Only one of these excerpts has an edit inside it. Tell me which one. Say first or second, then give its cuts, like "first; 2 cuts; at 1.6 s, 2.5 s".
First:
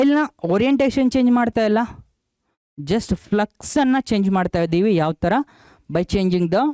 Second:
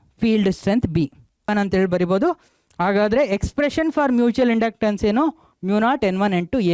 second; 1 cut; at 1.5 s